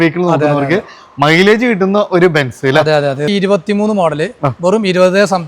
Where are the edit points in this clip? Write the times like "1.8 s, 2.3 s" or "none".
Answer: 3.2 s

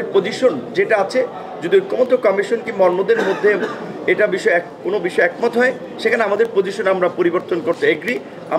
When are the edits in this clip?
none

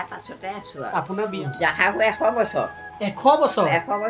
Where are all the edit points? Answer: 1.4 s

